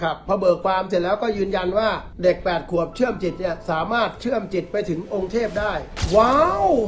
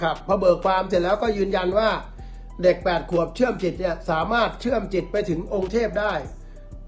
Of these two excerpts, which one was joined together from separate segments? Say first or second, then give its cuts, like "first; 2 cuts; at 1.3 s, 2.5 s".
first; 2 cuts; at 2.1 s, 5.9 s